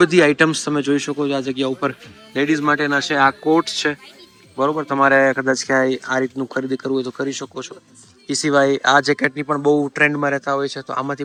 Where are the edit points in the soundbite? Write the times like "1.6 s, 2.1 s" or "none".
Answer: none